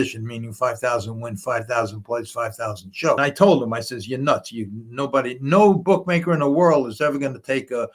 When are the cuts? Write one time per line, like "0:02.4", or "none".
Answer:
0:03.2

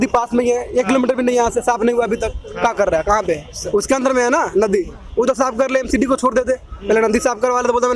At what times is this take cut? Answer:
none

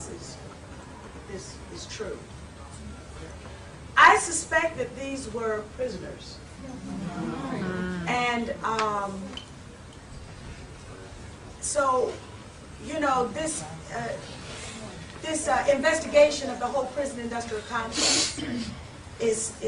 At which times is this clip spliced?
none

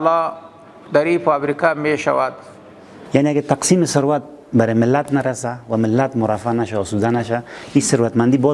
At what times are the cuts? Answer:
0:02.9

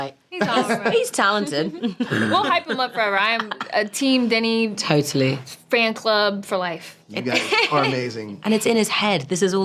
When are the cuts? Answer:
none

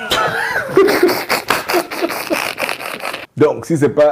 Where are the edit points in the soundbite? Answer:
0:03.2

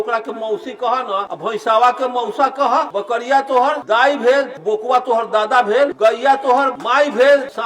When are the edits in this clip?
0:01.3
0:02.9
0:03.8
0:04.6
0:05.9
0:06.8

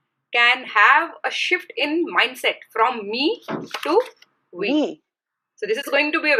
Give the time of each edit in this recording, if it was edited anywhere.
none

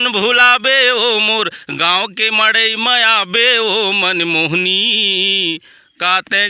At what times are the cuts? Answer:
none

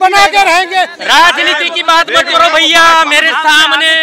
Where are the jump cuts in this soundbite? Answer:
0:01.0

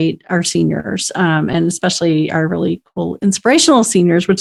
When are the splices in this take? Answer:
none

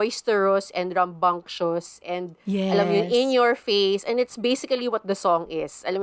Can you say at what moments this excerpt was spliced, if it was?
none

